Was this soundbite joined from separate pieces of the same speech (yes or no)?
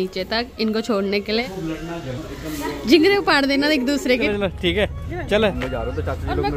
yes